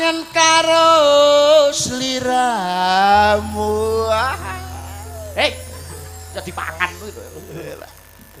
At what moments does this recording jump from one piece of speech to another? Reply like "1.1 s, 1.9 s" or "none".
none

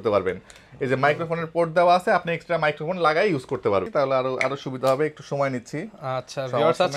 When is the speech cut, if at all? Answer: 3.9 s

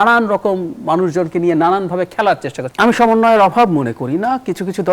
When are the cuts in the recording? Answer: 2.6 s

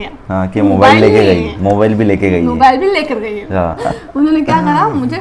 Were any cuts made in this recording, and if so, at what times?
3.8 s

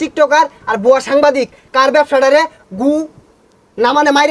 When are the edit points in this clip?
none

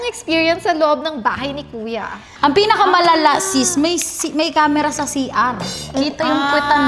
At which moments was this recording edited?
2.5 s

